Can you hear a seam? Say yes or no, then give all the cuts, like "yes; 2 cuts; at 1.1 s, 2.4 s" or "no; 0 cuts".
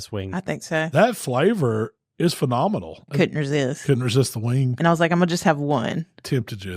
yes; 2 cuts; at 0.9 s, 3.0 s